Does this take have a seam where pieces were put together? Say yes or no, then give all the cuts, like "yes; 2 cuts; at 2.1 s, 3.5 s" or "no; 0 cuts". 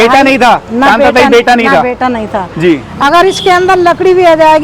yes; 1 cut; at 2.9 s